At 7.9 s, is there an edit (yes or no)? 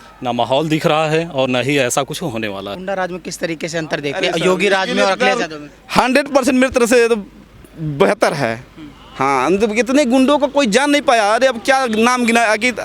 no